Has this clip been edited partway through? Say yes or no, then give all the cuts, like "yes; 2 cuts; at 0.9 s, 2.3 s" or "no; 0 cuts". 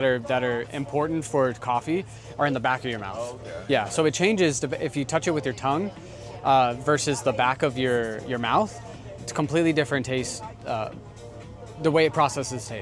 no; 0 cuts